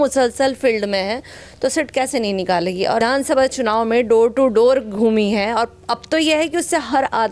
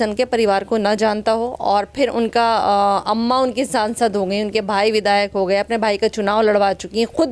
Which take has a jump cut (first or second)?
first